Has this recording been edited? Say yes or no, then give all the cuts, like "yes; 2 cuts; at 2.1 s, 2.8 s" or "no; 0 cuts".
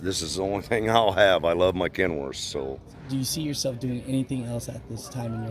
yes; 1 cut; at 2.9 s